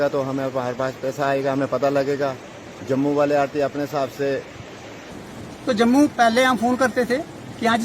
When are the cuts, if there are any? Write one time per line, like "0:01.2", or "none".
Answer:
0:05.1